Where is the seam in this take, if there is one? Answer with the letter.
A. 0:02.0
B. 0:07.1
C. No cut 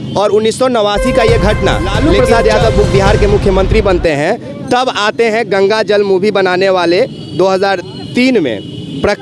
A